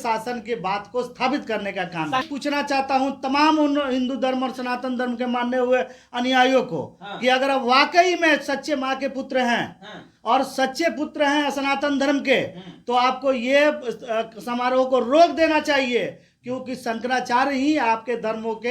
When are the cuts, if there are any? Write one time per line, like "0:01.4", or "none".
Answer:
0:02.2